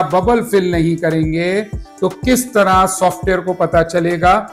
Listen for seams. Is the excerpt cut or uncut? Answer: uncut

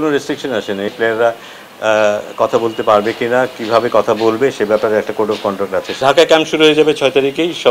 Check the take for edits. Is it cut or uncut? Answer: cut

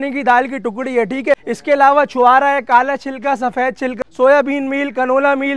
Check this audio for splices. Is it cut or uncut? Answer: cut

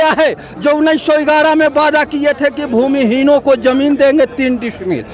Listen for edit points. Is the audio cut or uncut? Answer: uncut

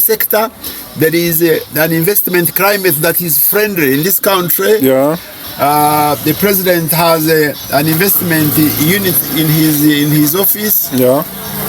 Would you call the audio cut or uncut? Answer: uncut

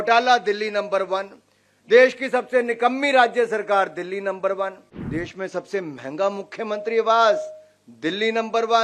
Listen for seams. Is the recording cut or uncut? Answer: cut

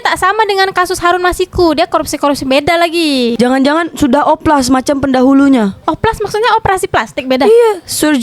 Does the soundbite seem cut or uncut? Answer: cut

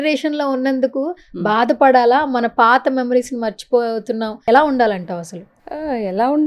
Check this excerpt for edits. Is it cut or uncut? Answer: uncut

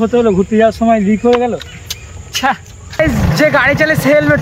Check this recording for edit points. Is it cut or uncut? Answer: cut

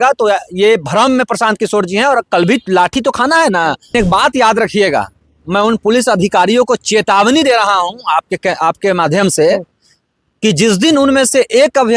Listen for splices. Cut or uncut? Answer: cut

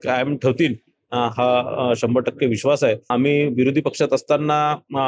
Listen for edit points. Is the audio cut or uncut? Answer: cut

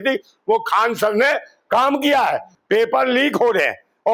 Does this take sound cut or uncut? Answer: cut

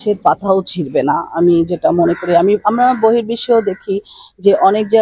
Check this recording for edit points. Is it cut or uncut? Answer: uncut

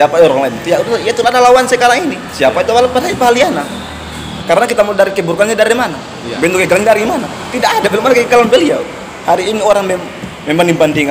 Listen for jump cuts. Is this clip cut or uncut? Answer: cut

